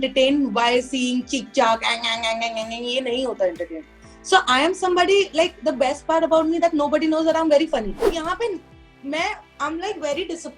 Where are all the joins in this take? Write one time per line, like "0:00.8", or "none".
0:08.1